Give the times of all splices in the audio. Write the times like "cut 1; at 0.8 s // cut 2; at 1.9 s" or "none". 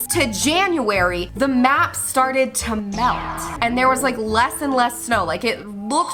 none